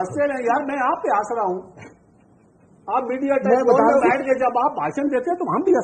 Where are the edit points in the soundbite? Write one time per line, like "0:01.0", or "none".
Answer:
none